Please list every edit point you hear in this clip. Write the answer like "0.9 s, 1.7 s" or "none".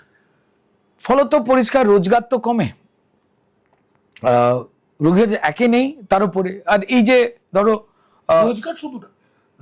none